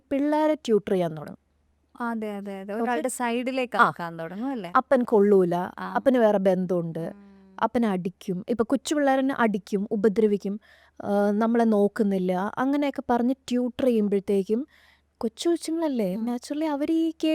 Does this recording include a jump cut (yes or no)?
no